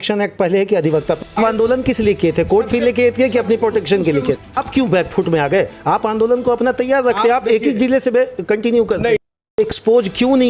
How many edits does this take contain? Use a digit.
3